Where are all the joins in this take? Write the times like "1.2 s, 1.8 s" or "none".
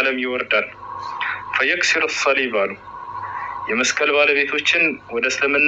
none